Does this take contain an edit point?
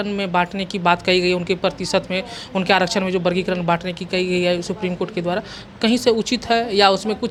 no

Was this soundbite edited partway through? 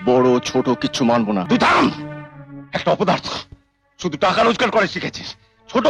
yes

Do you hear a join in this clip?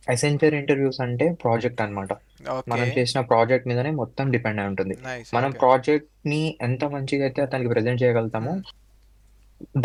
no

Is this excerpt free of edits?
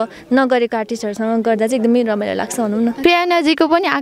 no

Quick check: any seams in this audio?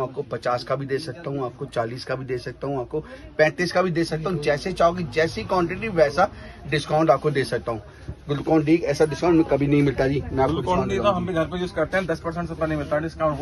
no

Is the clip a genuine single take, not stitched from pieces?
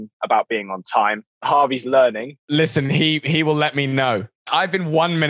no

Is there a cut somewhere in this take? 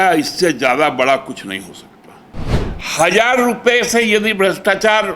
yes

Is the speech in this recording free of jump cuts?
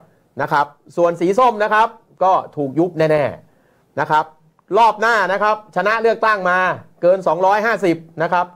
yes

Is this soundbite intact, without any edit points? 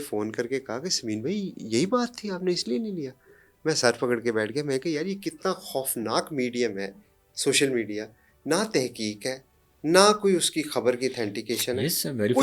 yes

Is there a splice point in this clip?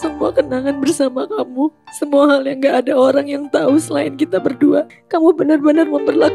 yes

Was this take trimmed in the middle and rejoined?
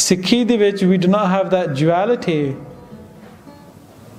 no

